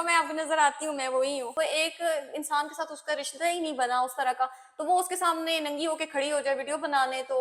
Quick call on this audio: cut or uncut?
cut